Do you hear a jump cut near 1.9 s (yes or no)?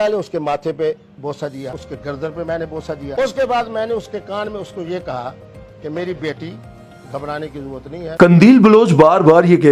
yes